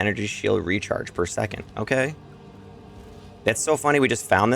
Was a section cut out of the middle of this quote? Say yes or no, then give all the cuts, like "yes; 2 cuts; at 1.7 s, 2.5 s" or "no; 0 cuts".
no; 0 cuts